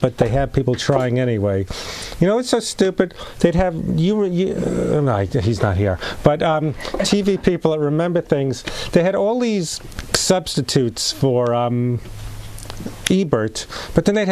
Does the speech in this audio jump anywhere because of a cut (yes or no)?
yes